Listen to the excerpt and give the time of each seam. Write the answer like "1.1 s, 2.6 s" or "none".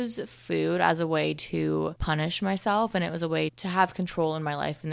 2.0 s